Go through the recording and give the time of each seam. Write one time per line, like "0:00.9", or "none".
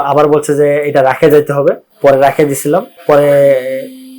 0:01.9
0:02.9